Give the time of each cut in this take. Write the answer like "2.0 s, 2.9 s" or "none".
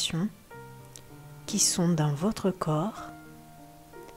2.9 s